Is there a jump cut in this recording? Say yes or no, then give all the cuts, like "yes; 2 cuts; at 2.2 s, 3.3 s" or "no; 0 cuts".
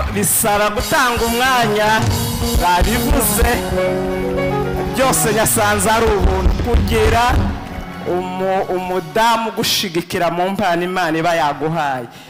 no; 0 cuts